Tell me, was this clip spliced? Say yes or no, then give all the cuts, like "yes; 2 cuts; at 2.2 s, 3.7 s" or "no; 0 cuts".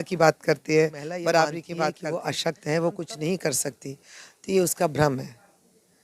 yes; 1 cut; at 2.0 s